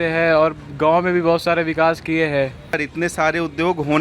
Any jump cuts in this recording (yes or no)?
yes